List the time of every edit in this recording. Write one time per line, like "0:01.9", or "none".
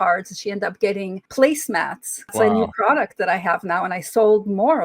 0:01.2
0:02.3